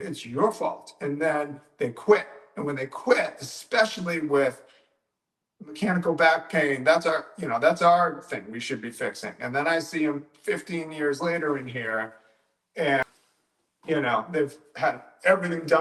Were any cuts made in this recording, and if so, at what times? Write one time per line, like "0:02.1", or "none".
none